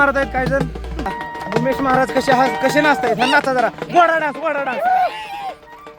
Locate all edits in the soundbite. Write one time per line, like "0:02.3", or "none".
0:01.1